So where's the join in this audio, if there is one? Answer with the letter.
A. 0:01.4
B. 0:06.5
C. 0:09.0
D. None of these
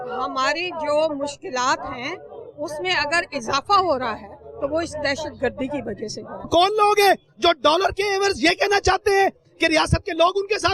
B